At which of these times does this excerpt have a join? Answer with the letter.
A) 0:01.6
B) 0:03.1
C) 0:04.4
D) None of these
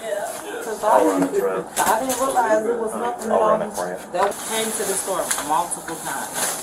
C